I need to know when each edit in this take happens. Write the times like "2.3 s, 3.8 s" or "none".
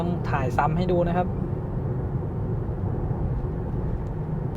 none